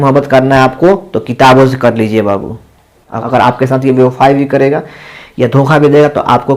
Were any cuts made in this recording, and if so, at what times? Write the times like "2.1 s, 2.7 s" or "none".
3.2 s